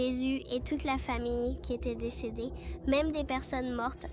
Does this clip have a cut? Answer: no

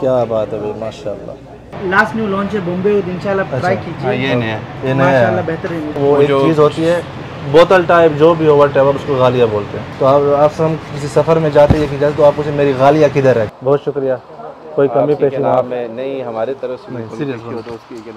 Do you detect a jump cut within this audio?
yes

